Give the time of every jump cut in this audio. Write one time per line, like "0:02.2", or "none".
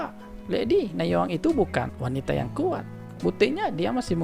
0:01.9
0:03.0